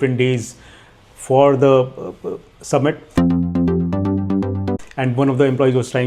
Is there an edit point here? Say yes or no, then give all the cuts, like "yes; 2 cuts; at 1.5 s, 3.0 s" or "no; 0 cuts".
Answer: yes; 1 cut; at 4.8 s